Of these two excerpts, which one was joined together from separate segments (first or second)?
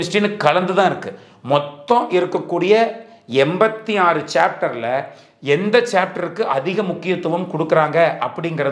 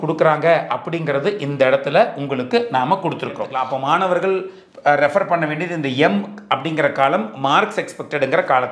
second